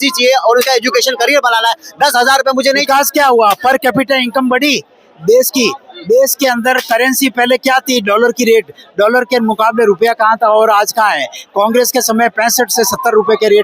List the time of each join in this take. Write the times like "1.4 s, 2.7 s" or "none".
2.8 s

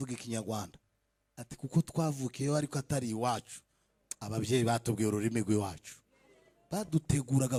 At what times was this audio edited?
none

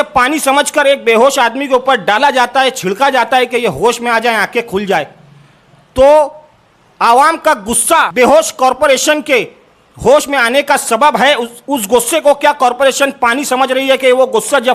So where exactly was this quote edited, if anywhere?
8.1 s

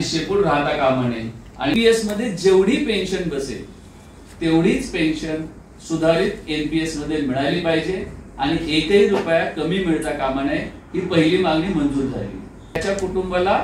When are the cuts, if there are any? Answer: 1.7 s, 12.8 s

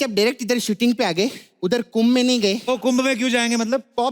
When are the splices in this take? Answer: 1.4 s, 2.7 s

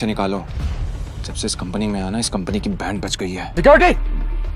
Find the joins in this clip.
3.4 s

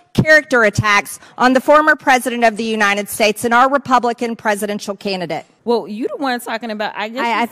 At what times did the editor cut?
5.5 s

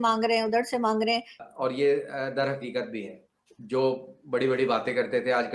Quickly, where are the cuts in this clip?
1.5 s

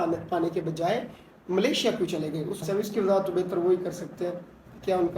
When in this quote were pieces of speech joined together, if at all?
2.6 s

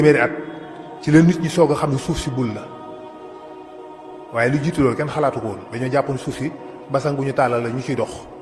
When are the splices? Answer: none

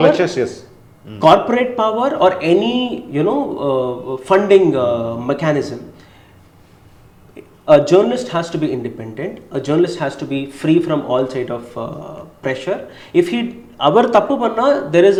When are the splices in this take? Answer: none

